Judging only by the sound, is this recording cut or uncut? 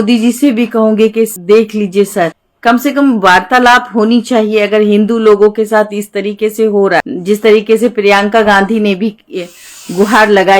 cut